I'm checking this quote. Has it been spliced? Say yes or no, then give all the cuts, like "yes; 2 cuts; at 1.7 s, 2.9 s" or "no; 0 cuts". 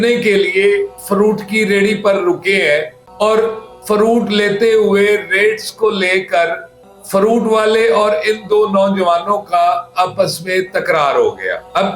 no; 0 cuts